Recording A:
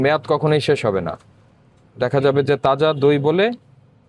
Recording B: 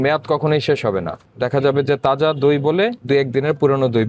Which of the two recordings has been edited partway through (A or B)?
B